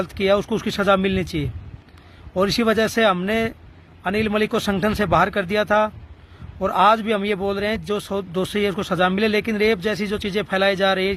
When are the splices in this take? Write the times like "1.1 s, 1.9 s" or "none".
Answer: none

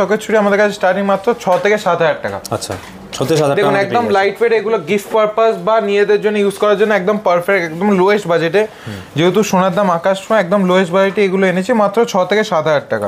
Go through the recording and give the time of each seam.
none

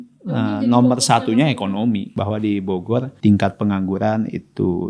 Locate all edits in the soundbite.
2.1 s, 3.1 s

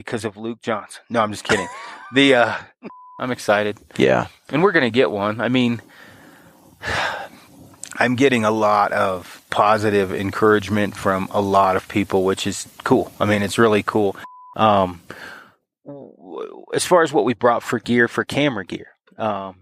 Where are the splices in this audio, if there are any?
3.1 s, 14.4 s

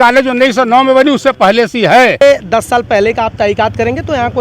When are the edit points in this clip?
2.2 s

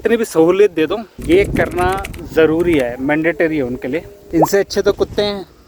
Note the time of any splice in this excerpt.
1.1 s, 4.2 s

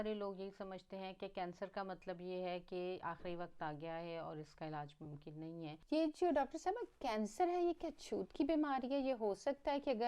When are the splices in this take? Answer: 5.8 s

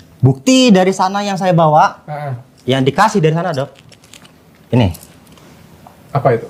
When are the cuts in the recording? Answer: none

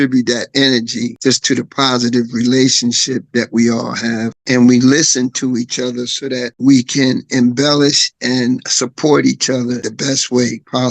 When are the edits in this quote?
4.3 s

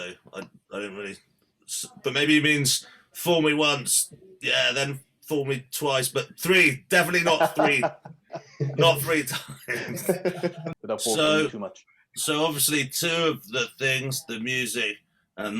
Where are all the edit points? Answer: 10.6 s

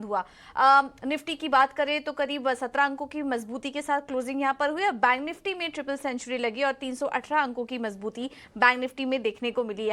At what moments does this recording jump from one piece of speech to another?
5.2 s

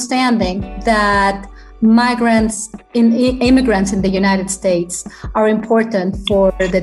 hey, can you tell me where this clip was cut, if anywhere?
none

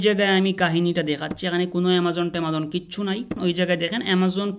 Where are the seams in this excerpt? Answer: 3.4 s

